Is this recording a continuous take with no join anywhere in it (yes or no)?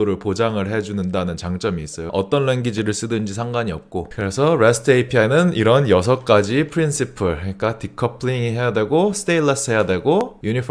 no